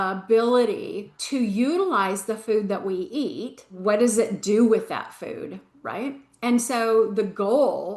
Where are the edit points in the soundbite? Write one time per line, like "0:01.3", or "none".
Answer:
0:01.1
0:03.7